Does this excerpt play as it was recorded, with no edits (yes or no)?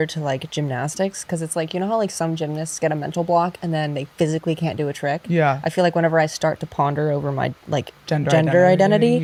yes